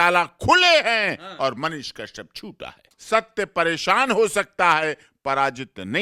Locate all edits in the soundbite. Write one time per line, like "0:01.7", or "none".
0:02.9